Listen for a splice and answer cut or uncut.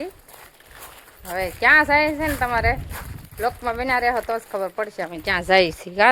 uncut